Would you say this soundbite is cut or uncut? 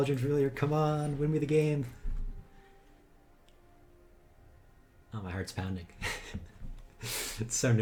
uncut